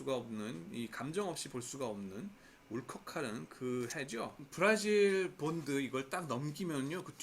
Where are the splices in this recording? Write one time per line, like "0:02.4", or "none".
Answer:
0:04.4